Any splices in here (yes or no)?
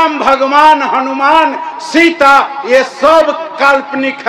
no